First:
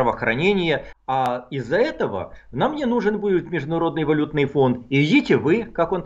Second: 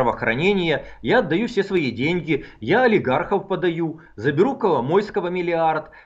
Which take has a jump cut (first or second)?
first